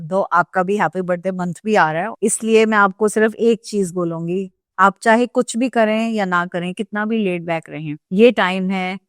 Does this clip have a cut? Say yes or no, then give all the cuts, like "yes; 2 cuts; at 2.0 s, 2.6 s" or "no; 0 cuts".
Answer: yes; 1 cut; at 2.1 s